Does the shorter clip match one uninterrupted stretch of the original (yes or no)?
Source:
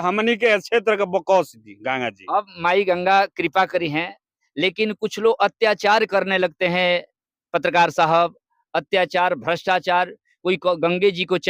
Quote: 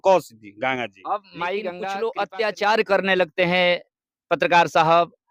no